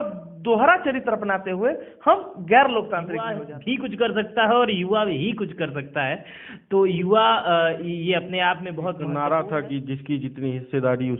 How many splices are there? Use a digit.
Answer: 2